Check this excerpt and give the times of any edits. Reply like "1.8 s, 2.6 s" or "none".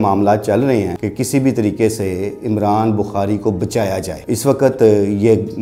1.0 s, 4.1 s